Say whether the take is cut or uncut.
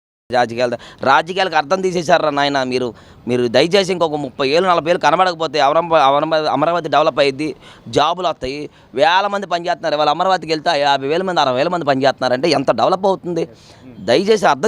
uncut